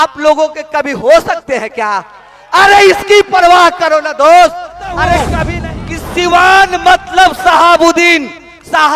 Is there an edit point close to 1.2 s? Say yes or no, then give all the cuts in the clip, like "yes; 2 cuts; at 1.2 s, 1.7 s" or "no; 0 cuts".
no; 1 cut; at 5.4 s